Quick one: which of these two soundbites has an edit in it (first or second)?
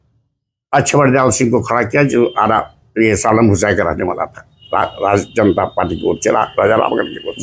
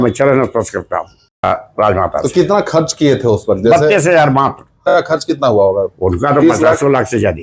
second